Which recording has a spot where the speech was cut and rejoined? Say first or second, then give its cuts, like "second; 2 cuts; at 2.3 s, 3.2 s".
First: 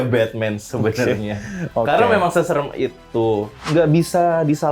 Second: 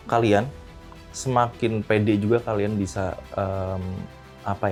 first; 1 cut; at 3.5 s